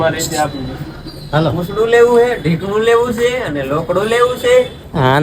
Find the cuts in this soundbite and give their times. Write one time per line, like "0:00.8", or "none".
none